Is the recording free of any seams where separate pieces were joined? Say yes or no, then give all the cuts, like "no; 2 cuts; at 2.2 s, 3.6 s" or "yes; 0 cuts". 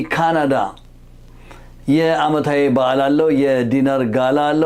yes; 0 cuts